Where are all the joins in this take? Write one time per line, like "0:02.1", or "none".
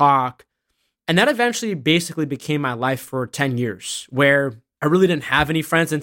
0:04.6